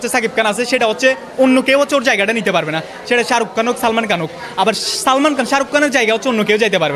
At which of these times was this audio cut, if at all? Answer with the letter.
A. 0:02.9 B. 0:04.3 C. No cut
C